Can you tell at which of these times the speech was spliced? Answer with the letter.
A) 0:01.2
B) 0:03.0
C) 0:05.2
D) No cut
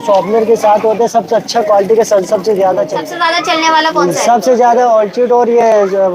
B